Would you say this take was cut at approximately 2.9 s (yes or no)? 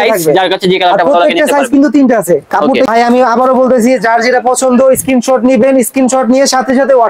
yes